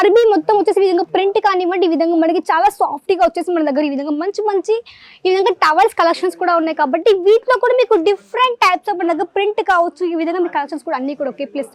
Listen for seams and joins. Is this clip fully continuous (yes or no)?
yes